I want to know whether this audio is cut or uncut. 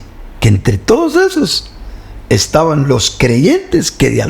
uncut